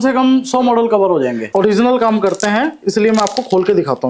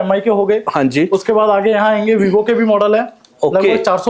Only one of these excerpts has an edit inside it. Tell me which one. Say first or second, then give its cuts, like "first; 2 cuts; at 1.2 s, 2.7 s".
first; 1 cut; at 1.4 s